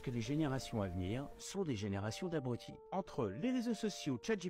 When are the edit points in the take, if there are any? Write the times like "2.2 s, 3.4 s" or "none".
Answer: 2.8 s